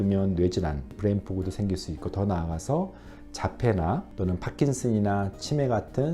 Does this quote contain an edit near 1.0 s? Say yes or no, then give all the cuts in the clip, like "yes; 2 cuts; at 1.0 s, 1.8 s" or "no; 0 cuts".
yes; 2 cuts; at 1.0 s, 4.1 s